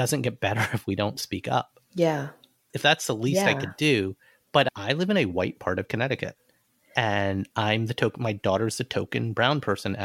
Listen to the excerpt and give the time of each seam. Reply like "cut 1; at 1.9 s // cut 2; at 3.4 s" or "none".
none